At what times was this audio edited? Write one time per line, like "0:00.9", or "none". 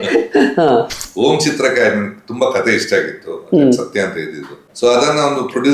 0:01.0
0:04.6